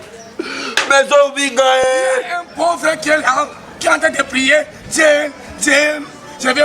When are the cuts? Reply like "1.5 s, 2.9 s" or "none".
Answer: 1.8 s